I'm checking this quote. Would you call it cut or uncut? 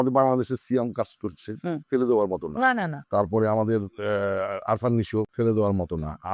cut